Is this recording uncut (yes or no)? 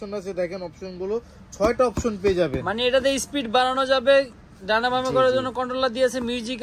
yes